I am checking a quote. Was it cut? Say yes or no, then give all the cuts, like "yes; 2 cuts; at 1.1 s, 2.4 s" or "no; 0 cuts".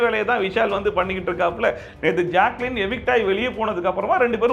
no; 0 cuts